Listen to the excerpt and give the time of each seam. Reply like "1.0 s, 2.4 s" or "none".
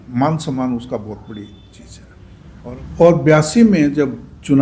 2.4 s